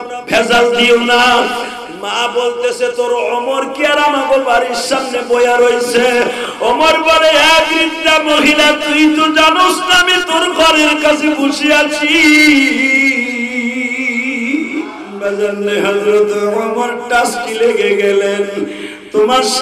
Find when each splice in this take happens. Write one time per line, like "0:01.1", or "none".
0:15.0